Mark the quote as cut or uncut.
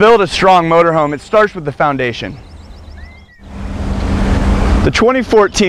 uncut